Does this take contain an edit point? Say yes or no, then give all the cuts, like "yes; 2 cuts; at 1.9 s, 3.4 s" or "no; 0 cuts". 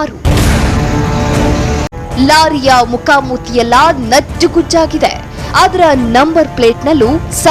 yes; 1 cut; at 1.8 s